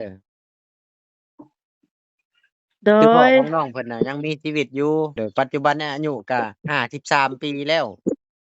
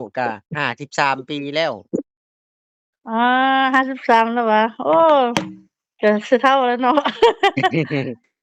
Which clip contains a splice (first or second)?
first